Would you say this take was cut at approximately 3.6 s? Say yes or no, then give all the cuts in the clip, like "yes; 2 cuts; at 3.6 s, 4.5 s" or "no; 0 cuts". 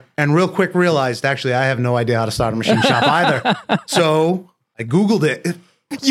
no; 0 cuts